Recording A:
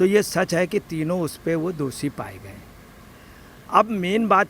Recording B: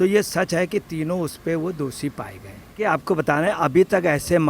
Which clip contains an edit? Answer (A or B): B